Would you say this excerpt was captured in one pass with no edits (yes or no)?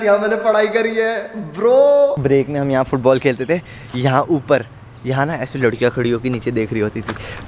no